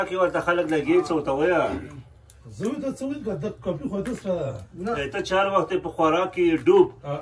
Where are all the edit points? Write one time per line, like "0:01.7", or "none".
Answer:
none